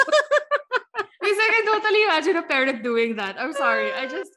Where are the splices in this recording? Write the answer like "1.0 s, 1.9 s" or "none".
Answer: none